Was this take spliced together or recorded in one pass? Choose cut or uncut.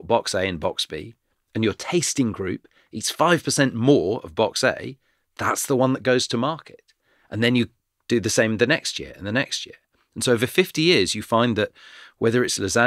uncut